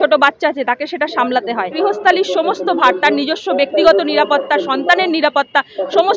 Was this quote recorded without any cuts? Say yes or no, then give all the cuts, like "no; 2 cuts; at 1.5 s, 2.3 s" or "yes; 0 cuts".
no; 1 cut; at 1.7 s